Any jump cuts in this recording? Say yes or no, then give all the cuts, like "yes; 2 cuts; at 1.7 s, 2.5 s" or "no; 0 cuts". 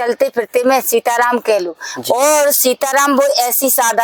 no; 0 cuts